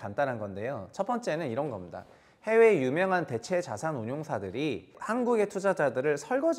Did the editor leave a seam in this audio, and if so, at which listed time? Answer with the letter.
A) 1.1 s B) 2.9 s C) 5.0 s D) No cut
C